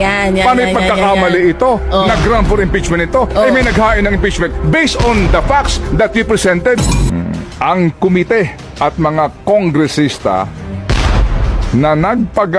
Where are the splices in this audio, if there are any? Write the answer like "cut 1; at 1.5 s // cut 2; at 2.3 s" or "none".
cut 1; at 7.0 s